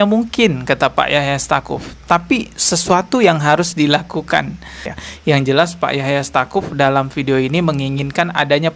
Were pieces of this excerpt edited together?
yes; 1 cut; at 5.0 s

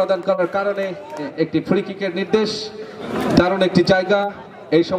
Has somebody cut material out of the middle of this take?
yes; 2 cuts; at 1.2 s, 3.1 s

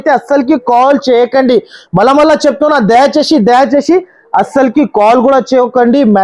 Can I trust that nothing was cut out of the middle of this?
yes; 0 cuts

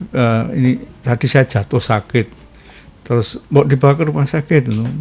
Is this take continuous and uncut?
yes; 0 cuts

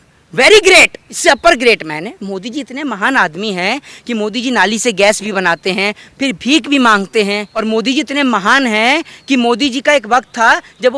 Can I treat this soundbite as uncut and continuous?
no; 3 cuts; at 1.0 s, 6.0 s, 7.6 s

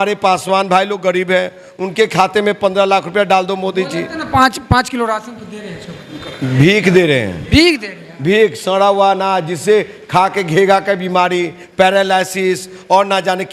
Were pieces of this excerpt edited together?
no; 0 cuts

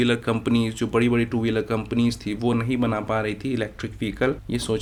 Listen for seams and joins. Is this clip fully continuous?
yes; 0 cuts

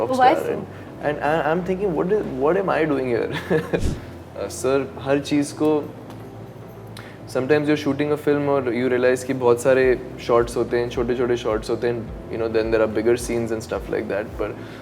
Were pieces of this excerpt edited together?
yes; 1 cut; at 3.9 s

